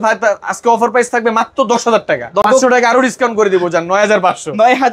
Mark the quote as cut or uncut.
cut